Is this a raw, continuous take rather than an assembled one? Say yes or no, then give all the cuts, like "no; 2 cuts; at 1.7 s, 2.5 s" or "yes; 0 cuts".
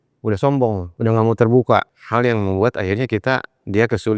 no; 2 cuts; at 0.9 s, 2.0 s